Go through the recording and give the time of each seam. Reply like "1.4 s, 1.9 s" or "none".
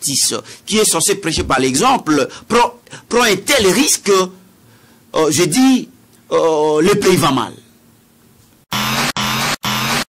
8.6 s